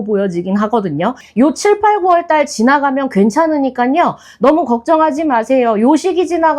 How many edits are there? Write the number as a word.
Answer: one